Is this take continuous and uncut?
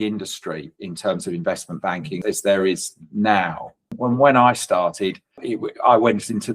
no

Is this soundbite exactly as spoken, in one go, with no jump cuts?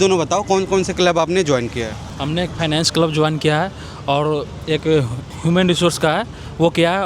yes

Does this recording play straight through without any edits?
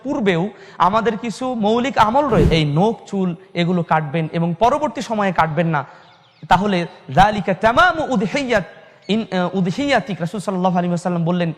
no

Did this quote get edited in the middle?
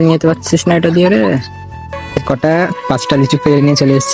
yes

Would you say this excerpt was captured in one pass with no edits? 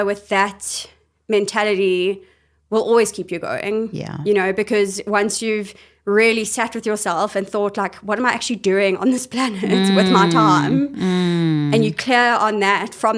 yes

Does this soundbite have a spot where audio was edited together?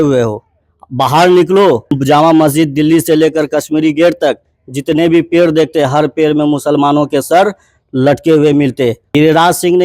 yes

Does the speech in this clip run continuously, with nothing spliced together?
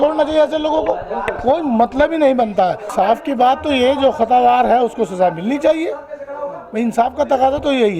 no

